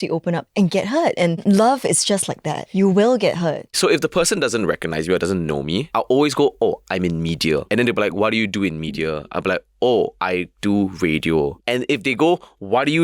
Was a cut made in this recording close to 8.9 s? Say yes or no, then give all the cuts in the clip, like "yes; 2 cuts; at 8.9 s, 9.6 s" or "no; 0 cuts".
no; 7 cuts; at 1.4 s, 2.6 s, 3.7 s, 5.9 s, 7.6 s, 10.2 s, 11.6 s